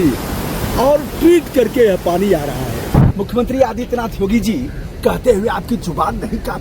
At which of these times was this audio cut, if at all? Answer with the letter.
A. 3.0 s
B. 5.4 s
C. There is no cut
A